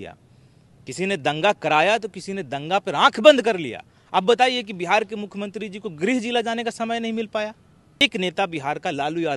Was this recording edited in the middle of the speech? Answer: yes; 1 cut; at 8.0 s

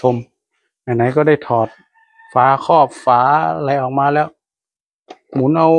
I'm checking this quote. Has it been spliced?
no; 0 cuts

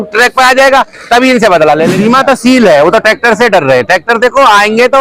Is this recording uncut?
no; 1 cut; at 1.9 s

